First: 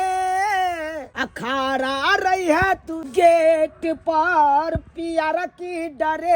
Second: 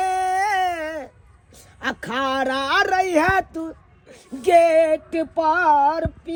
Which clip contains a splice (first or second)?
first